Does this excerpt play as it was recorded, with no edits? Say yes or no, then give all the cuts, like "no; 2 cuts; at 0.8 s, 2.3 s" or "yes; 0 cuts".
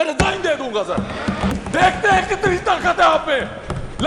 no; 1 cut; at 1.5 s